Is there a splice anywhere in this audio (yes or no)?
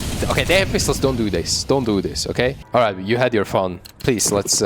yes